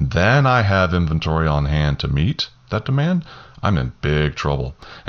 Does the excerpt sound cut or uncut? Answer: uncut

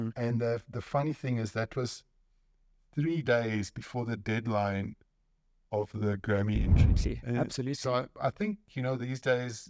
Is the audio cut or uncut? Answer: cut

